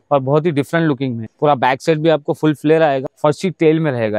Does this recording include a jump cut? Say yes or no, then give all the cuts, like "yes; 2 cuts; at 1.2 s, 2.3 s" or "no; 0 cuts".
yes; 2 cuts; at 1.2 s, 3.1 s